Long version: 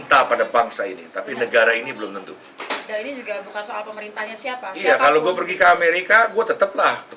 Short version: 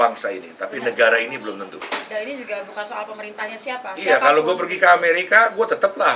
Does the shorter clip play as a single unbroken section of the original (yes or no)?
no